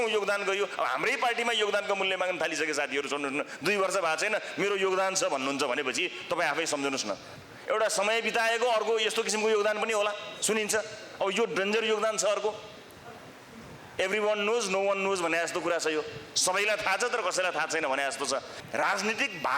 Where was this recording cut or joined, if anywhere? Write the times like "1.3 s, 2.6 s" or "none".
7.3 s, 18.6 s